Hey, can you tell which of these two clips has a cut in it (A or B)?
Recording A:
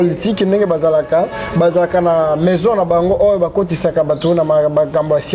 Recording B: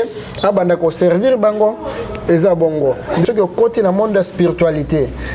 B